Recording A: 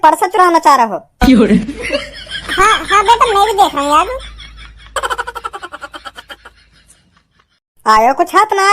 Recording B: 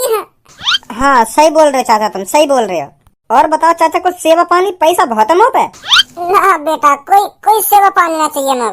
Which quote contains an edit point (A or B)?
A